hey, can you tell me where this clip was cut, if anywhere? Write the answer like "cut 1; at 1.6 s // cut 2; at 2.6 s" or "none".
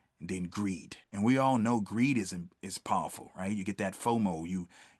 cut 1; at 1.0 s